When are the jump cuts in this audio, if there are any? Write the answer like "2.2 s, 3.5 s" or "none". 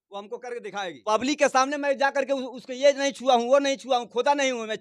0.9 s